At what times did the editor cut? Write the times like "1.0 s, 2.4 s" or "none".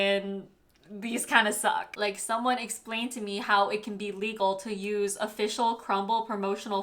1.9 s